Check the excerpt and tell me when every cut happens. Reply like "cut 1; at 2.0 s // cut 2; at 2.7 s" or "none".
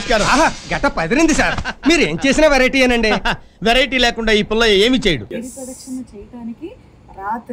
cut 1; at 5.3 s